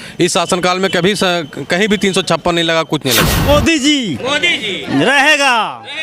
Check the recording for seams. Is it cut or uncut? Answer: cut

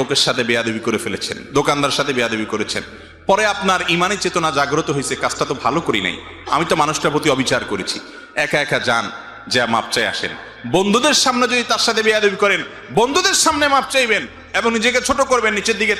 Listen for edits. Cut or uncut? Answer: uncut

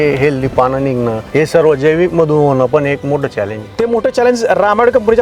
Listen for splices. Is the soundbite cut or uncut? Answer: cut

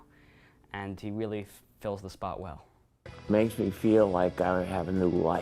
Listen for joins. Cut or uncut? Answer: cut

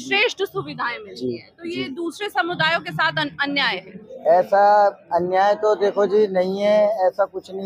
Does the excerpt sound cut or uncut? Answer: uncut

